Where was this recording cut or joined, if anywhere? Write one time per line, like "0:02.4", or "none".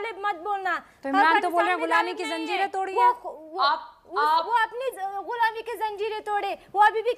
none